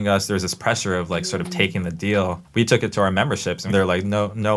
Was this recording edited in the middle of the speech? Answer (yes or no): yes